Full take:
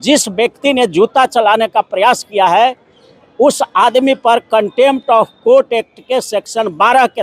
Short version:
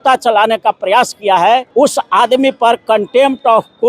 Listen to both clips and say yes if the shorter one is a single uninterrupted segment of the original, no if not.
no